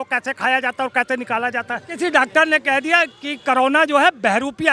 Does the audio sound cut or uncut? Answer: cut